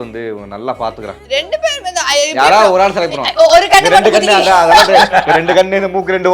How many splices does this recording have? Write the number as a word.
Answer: zero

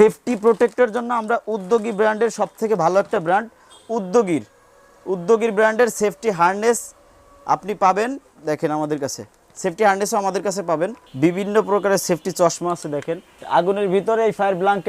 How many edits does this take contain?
two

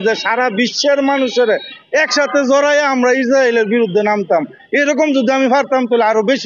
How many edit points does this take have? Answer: zero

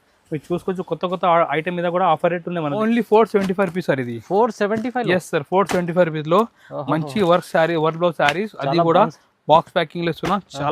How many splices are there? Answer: one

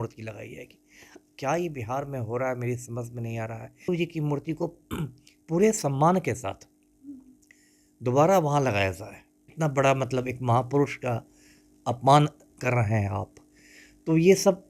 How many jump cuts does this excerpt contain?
two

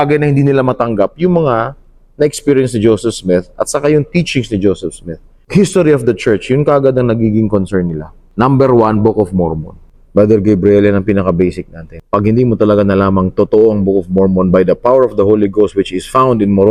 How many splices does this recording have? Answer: zero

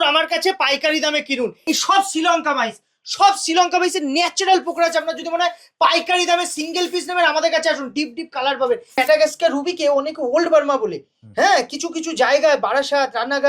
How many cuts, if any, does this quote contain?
two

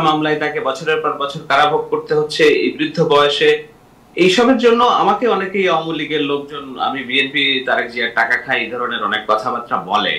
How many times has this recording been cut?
zero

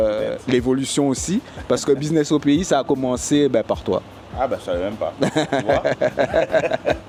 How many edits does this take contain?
zero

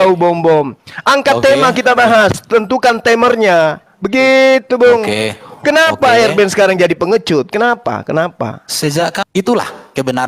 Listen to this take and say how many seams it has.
one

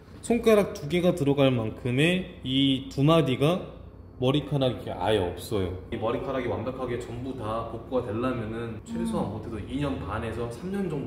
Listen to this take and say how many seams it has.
one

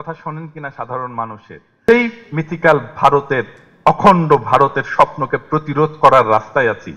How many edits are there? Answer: one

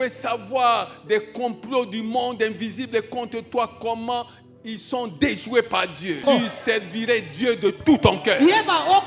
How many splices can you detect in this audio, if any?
one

